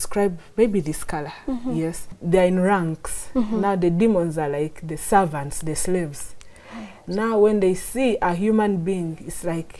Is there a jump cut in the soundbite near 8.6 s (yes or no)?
no